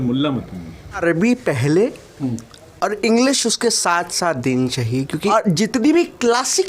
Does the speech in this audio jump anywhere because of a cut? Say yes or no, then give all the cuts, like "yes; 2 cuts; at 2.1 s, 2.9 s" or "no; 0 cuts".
yes; 2 cuts; at 1.0 s, 5.3 s